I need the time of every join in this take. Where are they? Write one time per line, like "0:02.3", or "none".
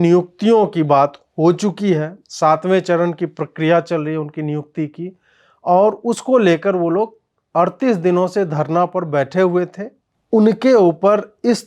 0:10.1

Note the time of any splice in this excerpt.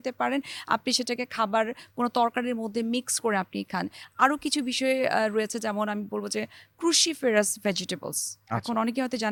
none

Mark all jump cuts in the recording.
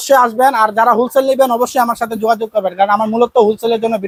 none

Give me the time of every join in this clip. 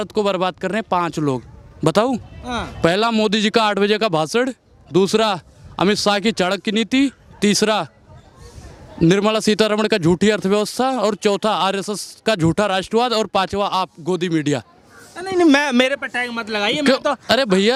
none

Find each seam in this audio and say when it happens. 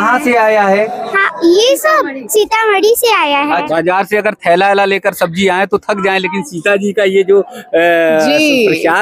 0:03.7

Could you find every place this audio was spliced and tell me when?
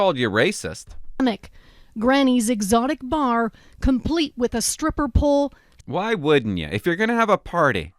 0:01.2

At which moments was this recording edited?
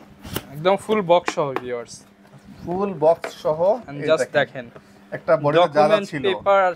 none

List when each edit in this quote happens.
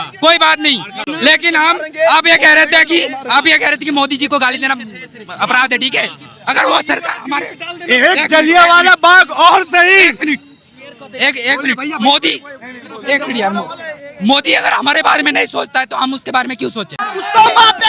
none

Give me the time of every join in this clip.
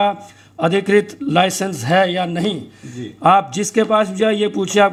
none

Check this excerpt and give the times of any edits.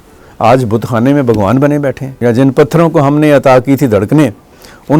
0:02.1

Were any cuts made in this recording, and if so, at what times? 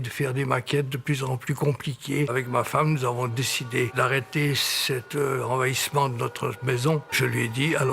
0:02.3
0:03.9
0:07.1

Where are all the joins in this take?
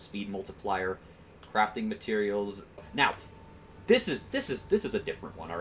0:02.9

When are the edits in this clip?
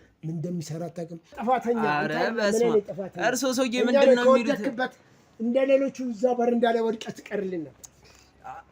0:01.4

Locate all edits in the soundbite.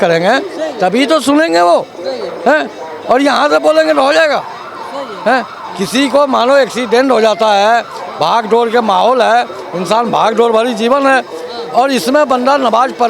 none

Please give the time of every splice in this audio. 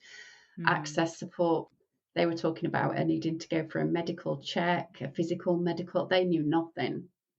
0:01.7

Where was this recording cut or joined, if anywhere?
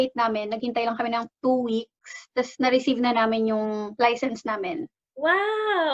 none

